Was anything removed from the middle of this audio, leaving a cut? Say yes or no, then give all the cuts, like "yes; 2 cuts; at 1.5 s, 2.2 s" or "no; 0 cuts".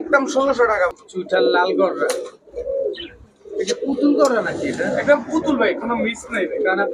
yes; 1 cut; at 0.9 s